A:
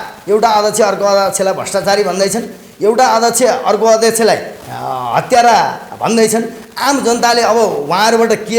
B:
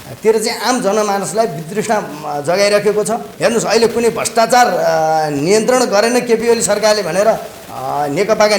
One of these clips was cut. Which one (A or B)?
B